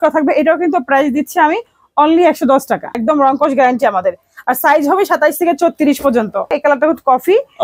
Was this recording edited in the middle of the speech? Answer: yes; 2 cuts; at 3.0 s, 6.6 s

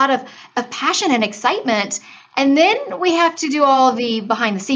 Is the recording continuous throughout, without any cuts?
no; 1 cut; at 3.8 s

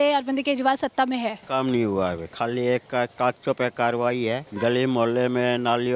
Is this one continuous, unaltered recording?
no; 3 cuts; at 1.4 s, 2.3 s, 4.5 s

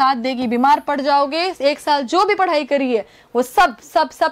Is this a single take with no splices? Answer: yes; 0 cuts

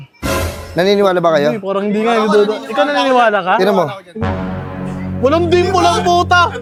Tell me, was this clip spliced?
no; 0 cuts

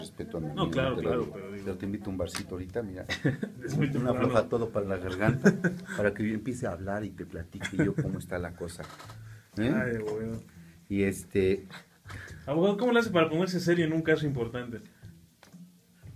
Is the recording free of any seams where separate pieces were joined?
no; 1 cut; at 4.6 s

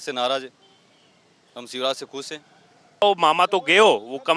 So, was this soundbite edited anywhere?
yes; 1 cut; at 3.0 s

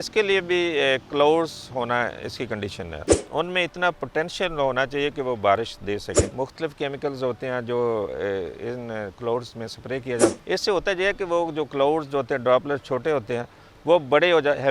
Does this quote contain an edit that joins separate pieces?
yes; 3 cuts; at 3.2 s, 6.2 s, 10.3 s

